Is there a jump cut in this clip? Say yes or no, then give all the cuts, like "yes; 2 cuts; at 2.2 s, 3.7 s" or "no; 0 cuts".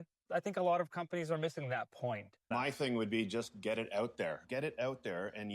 yes; 2 cuts; at 2.4 s, 4.4 s